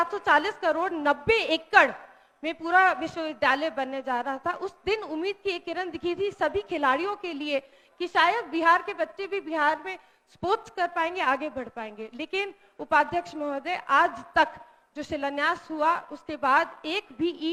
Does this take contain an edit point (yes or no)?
no